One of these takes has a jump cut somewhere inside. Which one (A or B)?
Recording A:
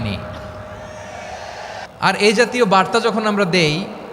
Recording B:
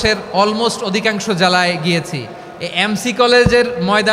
A